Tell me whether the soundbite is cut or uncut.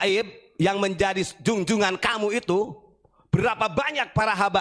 uncut